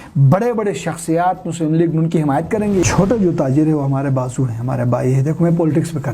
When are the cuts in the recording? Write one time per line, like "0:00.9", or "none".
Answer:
0:02.8